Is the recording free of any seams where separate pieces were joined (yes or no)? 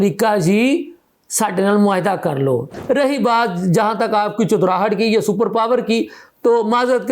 no